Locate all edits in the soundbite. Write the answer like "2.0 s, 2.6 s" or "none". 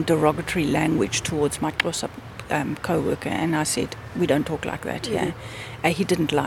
none